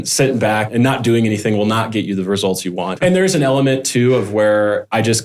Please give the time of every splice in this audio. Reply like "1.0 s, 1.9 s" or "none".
3.0 s